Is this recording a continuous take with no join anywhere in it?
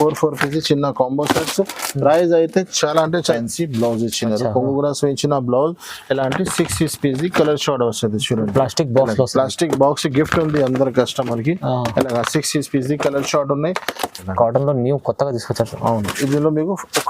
no; 2 cuts; at 3.2 s, 14.2 s

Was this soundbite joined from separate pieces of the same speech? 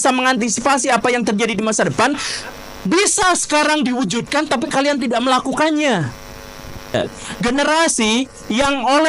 yes; 1 cut; at 6.9 s

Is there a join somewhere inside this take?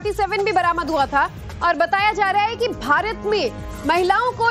no; 0 cuts

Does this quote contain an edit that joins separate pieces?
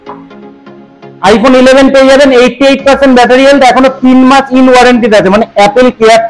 no; 0 cuts

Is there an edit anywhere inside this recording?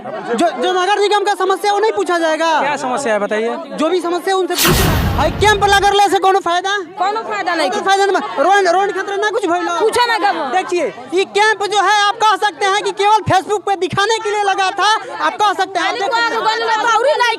yes; 1 cut; at 4.8 s

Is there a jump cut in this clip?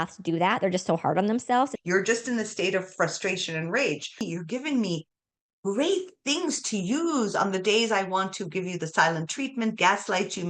yes; 2 cuts; at 1.7 s, 4.2 s

